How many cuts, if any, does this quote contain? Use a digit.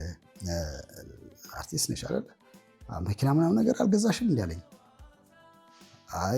1